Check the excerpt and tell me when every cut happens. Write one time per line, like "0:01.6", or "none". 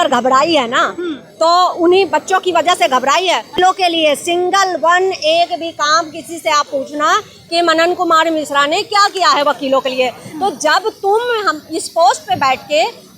0:03.6